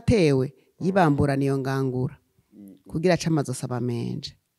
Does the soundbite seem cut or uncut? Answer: uncut